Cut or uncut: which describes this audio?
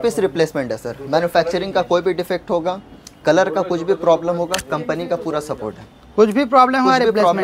uncut